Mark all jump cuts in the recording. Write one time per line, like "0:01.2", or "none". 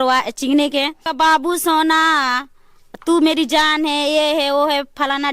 0:01.1